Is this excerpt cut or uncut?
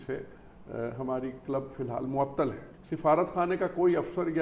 cut